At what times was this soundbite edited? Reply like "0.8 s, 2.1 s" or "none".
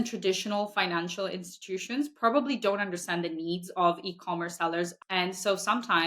4.9 s